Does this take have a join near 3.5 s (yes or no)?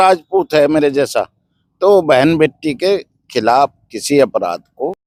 no